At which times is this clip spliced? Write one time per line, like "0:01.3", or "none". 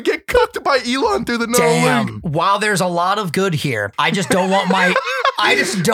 0:02.2
0:03.9